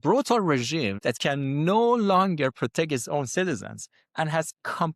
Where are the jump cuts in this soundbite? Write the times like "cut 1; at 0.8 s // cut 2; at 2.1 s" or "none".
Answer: cut 1; at 1.0 s